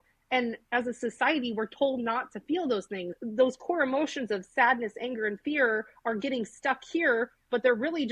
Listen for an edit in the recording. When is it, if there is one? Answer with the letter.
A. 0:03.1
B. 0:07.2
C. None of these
A